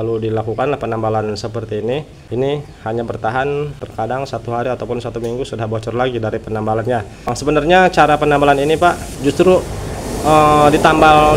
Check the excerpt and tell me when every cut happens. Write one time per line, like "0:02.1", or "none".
0:02.2
0:03.8
0:07.4
0:09.1